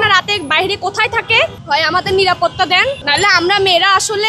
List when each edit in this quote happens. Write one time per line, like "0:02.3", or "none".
0:01.6
0:03.0